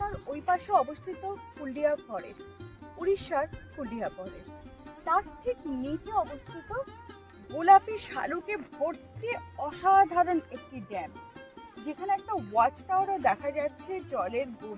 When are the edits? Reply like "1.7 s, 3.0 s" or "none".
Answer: none